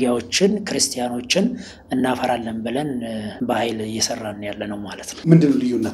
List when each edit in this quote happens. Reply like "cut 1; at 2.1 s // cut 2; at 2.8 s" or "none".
cut 1; at 3.3 s // cut 2; at 5.0 s